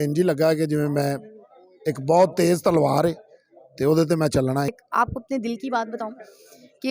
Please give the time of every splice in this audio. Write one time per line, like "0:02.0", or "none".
0:04.7

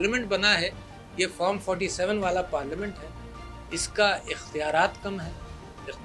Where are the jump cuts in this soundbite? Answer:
none

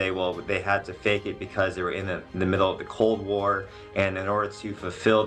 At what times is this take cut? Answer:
none

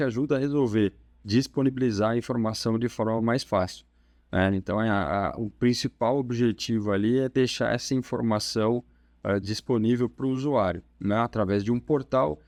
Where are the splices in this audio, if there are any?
none

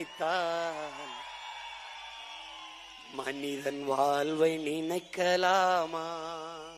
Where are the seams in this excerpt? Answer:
none

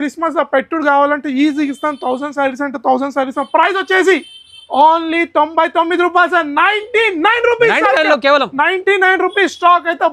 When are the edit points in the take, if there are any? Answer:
none

